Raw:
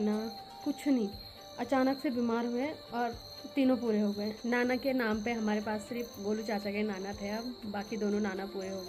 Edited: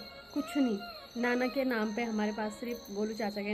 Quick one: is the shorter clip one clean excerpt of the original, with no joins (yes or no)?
no